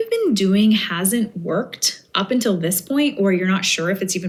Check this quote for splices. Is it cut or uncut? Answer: uncut